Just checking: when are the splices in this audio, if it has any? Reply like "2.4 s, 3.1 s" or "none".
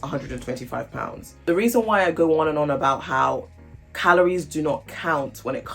1.3 s